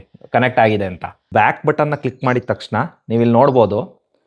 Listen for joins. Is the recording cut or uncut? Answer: cut